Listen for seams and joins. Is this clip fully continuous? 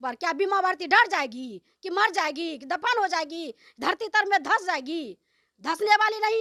yes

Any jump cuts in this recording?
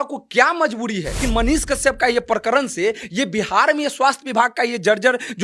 yes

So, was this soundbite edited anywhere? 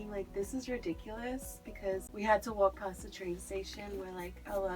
yes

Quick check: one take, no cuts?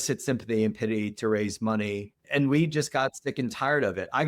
no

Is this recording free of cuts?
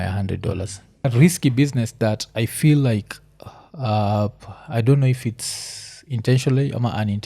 no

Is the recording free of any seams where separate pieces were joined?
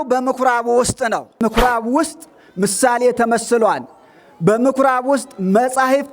no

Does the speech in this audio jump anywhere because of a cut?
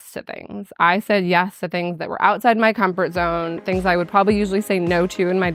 no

